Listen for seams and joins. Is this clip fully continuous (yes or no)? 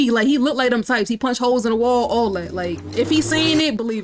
no